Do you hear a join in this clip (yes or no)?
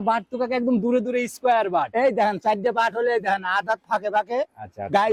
no